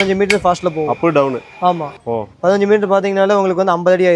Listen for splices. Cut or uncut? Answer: uncut